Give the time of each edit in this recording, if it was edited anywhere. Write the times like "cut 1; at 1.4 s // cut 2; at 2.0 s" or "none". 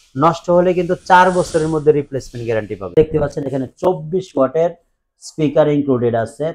cut 1; at 2.8 s